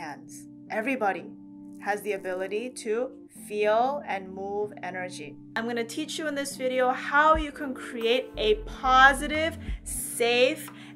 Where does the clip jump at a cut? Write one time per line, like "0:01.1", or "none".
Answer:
0:05.5